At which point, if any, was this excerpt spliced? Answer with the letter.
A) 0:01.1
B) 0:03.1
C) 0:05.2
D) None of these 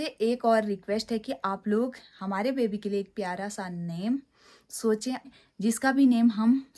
C